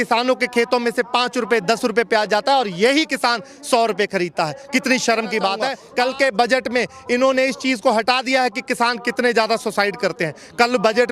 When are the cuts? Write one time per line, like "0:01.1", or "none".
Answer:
0:05.8